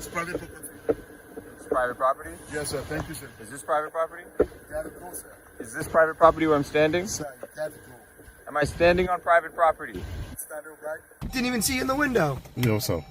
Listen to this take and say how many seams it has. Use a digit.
1